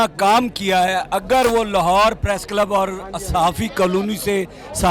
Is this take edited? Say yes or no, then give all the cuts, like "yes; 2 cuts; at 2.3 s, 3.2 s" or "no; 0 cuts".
no; 0 cuts